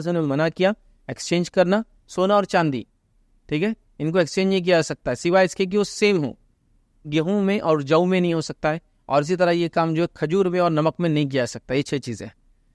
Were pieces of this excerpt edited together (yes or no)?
yes